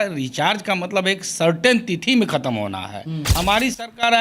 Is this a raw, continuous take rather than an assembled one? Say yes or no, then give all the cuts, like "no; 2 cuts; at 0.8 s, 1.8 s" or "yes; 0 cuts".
no; 1 cut; at 3.2 s